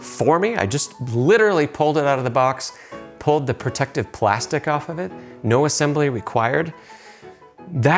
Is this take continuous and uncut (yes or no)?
yes